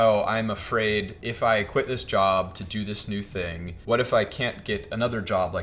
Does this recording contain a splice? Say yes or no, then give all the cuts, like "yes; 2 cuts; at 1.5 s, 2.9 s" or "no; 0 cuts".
yes; 2 cuts; at 1.2 s, 3.7 s